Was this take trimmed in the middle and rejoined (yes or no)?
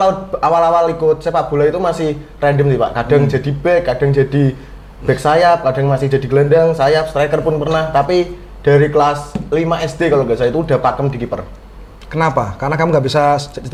no